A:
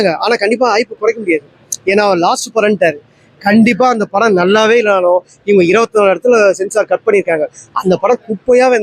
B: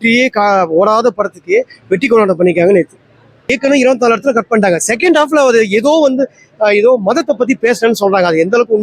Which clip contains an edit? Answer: B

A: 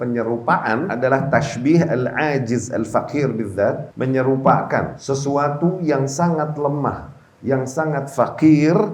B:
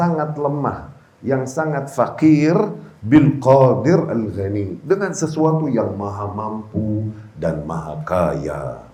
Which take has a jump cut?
A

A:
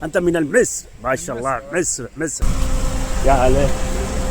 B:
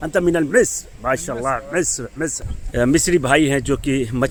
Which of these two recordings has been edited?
A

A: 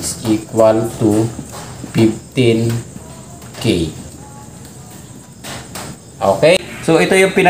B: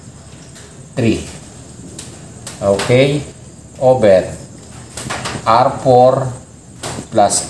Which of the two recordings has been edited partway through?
A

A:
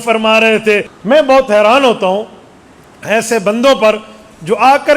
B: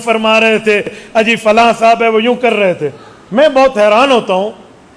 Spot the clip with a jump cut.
A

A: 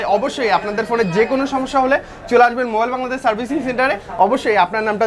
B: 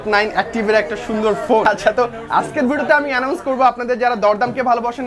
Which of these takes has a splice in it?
B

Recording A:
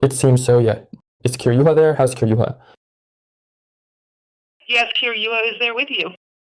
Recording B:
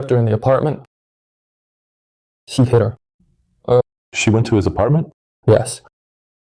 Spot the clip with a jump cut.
A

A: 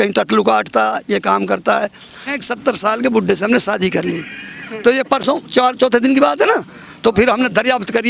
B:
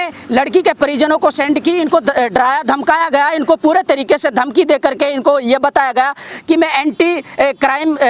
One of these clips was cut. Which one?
A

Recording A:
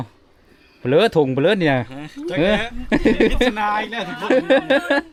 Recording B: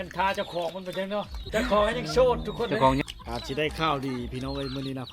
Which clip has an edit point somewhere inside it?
B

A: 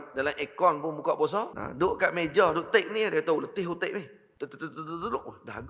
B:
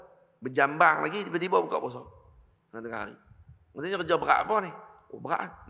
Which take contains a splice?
A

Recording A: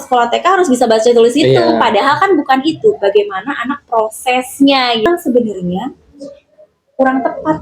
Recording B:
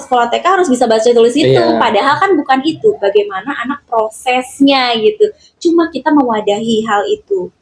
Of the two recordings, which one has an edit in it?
A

